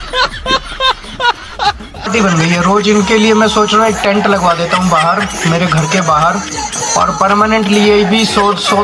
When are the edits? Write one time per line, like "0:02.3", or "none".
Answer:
0:02.1